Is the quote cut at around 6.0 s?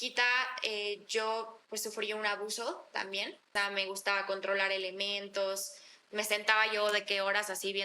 no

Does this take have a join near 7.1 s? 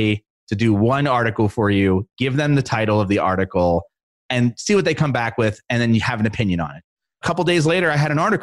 yes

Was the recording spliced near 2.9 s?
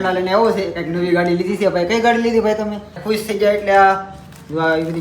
yes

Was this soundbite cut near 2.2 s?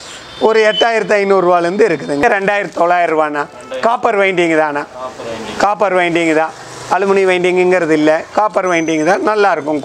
yes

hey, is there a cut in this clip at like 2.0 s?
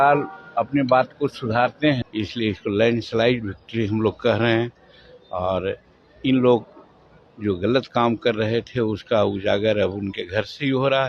yes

